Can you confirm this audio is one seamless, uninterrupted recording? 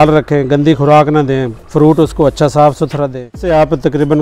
no; 1 cut; at 3.3 s

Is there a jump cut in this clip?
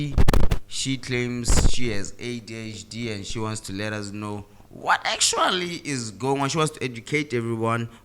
no; 0 cuts

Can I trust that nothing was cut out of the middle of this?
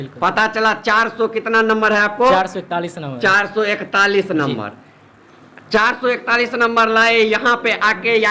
yes; 0 cuts

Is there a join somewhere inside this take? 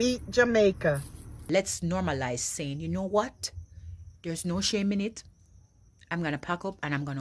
yes; 1 cut; at 1.4 s

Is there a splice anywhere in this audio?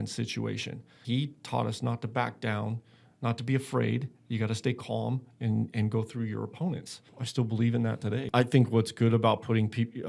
yes; 3 cuts; at 1.0 s, 7.2 s, 8.3 s

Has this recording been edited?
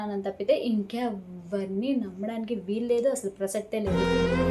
no; 0 cuts

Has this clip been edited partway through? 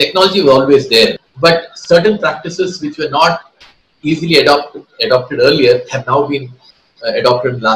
yes; 1 cut; at 1.2 s

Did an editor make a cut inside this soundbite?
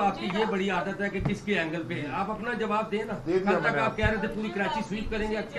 no; 0 cuts

